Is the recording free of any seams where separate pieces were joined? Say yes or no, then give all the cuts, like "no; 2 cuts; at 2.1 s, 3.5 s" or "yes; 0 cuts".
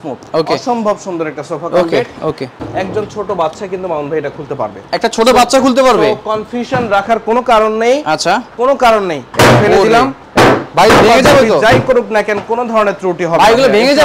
no; 1 cut; at 2.6 s